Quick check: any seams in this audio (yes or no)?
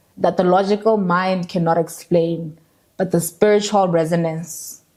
no